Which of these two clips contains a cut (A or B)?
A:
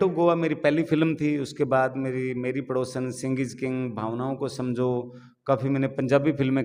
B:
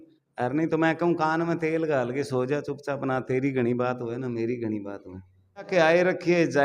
B